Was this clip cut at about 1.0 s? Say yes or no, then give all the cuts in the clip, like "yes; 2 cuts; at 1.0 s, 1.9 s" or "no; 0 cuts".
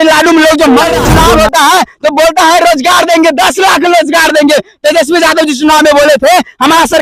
yes; 1 cut; at 1.0 s